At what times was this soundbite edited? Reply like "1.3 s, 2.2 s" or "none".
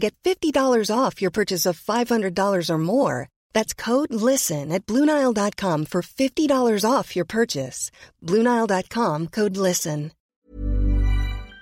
10.2 s